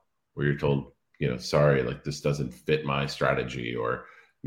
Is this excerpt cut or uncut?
uncut